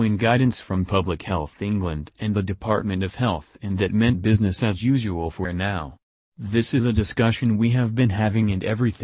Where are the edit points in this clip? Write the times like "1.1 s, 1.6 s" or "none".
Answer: 6.7 s